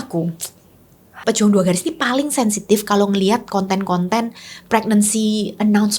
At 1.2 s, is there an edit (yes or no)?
yes